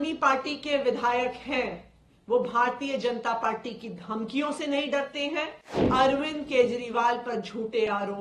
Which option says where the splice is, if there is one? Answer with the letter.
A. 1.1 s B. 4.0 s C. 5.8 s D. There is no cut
C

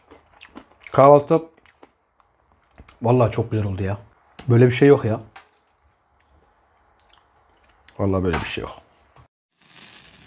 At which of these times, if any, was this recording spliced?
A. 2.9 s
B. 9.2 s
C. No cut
B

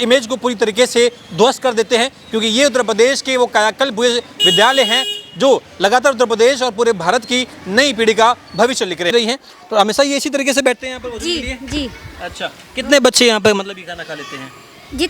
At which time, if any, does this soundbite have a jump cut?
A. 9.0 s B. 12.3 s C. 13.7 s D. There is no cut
A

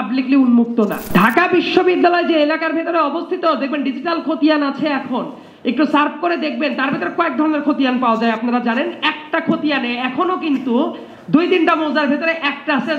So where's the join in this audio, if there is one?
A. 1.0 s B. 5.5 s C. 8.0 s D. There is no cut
A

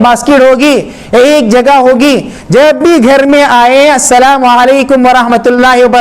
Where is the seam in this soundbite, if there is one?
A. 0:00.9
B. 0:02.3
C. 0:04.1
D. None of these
D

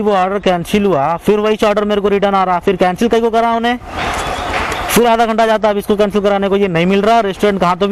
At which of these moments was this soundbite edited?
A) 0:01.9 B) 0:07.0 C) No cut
C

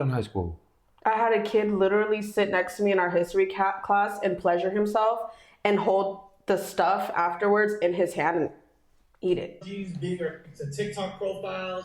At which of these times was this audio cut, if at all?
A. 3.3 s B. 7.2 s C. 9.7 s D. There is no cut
C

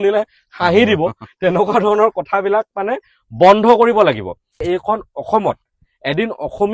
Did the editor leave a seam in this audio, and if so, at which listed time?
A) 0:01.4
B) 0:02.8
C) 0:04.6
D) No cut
C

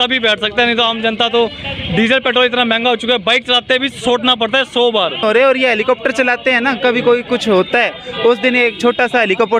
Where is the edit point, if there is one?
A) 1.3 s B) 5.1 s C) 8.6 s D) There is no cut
D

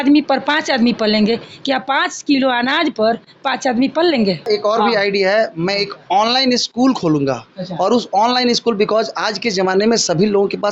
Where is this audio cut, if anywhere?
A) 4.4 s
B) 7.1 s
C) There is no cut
A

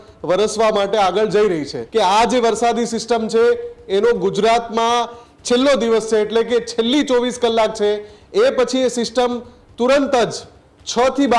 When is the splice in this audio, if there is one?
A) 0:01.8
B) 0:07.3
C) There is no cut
A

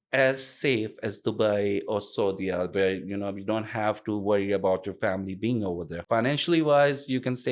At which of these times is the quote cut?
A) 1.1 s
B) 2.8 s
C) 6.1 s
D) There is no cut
C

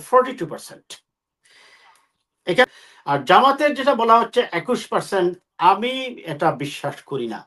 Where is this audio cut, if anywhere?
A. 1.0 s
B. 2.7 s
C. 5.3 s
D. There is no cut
B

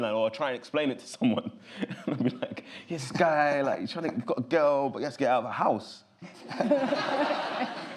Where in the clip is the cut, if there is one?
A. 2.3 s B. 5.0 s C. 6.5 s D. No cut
D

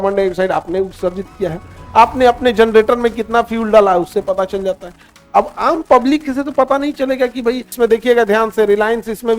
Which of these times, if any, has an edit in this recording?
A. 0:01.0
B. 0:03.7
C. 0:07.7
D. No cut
C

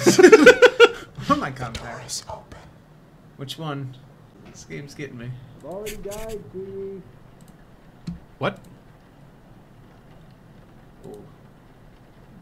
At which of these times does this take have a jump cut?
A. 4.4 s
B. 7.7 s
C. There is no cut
A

